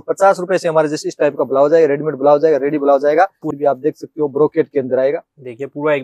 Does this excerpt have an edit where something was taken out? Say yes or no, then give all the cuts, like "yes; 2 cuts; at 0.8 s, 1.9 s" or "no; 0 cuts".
yes; 1 cut; at 3.5 s